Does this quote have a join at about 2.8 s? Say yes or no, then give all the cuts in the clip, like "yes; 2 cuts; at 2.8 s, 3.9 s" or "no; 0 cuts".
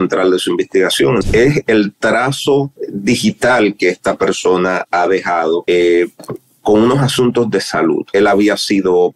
yes; 4 cuts; at 1.2 s, 2.8 s, 5.6 s, 8.0 s